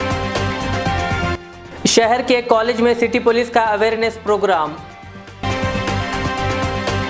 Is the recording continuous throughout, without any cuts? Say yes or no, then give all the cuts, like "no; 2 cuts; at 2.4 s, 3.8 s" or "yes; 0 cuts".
yes; 0 cuts